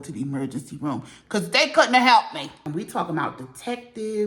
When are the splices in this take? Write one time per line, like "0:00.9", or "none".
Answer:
0:02.6